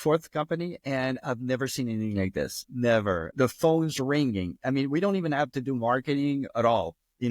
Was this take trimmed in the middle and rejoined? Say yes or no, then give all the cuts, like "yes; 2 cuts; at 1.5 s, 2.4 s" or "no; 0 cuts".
yes; 2 cuts; at 3.3 s, 6.5 s